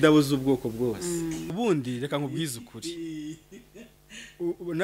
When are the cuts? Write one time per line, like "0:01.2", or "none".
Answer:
0:01.5